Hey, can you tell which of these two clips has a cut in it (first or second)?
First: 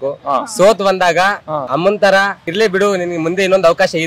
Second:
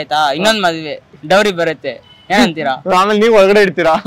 second